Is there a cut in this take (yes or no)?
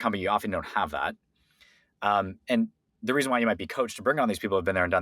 no